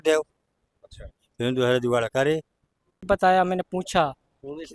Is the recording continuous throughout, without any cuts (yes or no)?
no